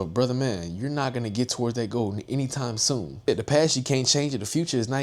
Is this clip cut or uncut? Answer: cut